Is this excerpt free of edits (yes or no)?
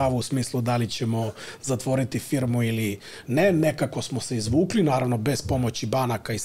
yes